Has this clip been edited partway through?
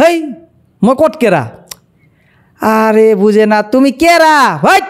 no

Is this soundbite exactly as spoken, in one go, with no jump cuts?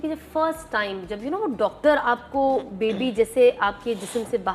yes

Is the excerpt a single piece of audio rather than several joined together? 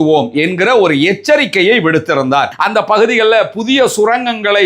no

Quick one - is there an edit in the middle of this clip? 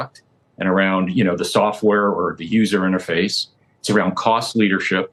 no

